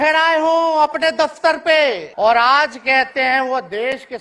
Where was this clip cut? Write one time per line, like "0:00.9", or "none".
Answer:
0:02.1